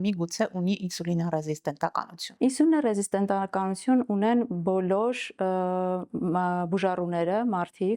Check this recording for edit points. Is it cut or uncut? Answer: cut